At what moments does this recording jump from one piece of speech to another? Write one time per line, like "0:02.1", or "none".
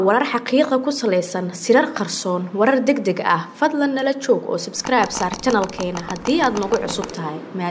none